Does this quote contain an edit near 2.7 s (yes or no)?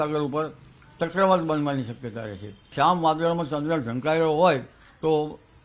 yes